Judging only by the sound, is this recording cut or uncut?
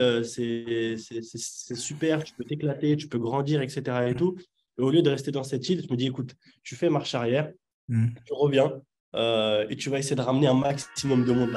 uncut